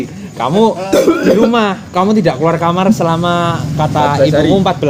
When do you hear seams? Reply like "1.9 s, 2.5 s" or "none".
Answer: none